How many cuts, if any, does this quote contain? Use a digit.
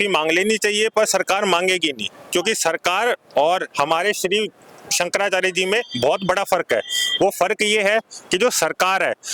0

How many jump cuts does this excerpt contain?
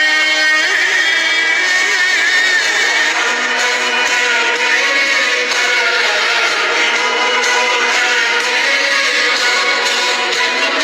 1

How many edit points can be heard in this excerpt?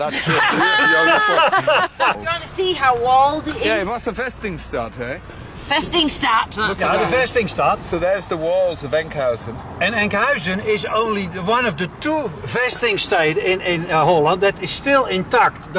1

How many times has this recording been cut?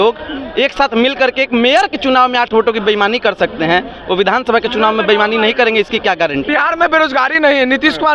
1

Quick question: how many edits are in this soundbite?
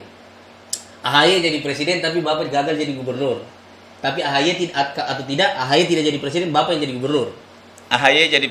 0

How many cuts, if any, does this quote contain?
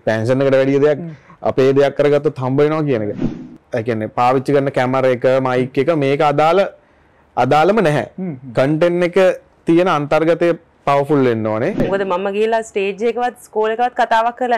2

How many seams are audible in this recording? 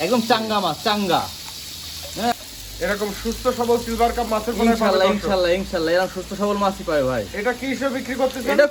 0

